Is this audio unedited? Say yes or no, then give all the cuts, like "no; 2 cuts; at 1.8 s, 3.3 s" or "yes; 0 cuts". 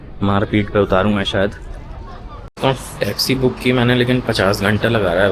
no; 1 cut; at 2.5 s